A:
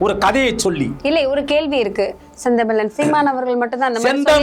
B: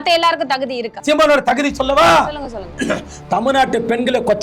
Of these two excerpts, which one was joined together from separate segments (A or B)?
B